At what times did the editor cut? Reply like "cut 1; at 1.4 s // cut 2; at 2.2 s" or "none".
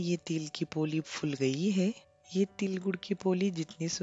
cut 1; at 2.1 s